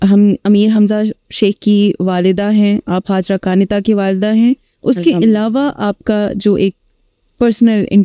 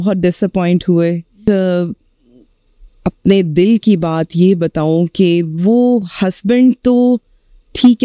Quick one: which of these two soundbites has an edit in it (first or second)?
second